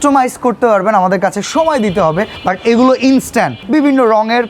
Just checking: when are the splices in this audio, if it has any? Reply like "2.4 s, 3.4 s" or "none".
2.3 s, 3.6 s